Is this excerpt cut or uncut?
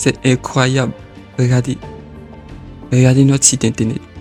uncut